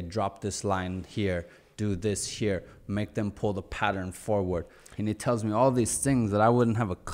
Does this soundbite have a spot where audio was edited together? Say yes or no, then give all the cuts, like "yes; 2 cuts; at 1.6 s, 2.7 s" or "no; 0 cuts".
no; 0 cuts